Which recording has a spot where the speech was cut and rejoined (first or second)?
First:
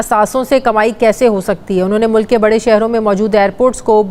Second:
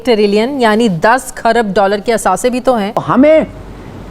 second